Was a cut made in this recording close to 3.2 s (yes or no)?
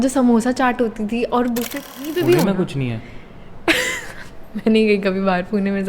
no